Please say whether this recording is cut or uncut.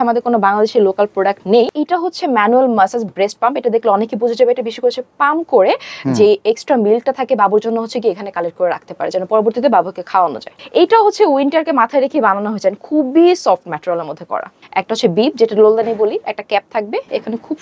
cut